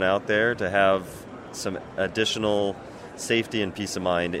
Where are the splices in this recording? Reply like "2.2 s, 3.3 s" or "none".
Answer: none